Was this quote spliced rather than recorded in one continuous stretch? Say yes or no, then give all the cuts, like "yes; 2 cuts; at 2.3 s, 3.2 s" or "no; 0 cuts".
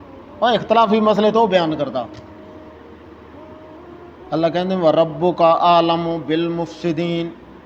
no; 0 cuts